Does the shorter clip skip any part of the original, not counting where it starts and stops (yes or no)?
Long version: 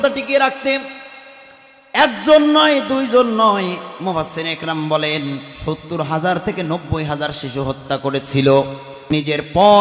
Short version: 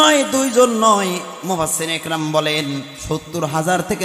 no